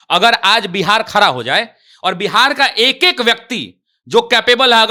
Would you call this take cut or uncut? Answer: uncut